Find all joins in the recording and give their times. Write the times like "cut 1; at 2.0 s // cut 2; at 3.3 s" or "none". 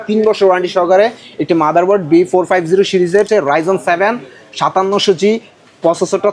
cut 1; at 3.3 s